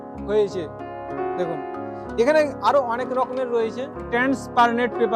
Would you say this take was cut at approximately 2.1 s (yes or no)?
no